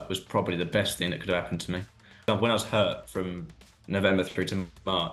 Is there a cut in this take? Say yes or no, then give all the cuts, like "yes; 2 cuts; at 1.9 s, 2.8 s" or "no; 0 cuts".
yes; 1 cut; at 2.2 s